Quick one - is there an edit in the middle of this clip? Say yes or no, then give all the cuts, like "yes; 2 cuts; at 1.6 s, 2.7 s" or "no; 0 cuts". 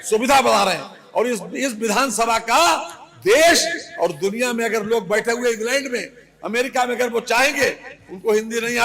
no; 0 cuts